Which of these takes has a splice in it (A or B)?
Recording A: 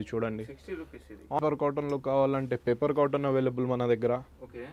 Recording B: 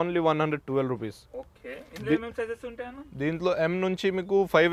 A